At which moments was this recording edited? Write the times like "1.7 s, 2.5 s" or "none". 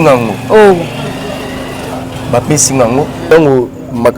3.2 s

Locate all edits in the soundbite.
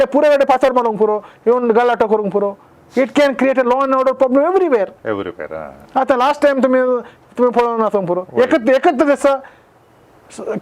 none

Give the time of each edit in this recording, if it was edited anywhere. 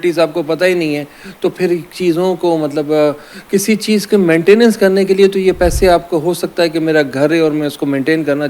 none

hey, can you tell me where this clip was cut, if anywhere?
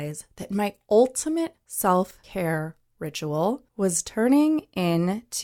1.6 s, 2.2 s, 3.7 s

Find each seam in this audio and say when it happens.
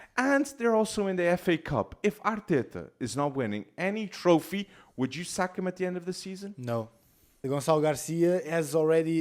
7.3 s

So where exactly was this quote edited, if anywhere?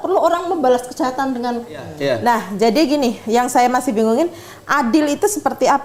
1.9 s

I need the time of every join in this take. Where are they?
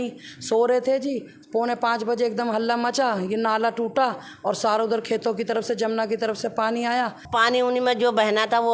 7.2 s

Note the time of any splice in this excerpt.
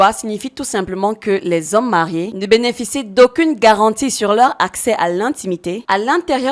none

